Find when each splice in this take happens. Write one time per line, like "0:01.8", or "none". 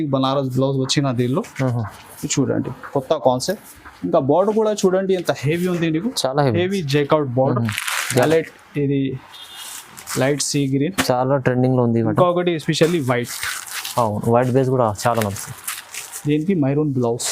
0:08.2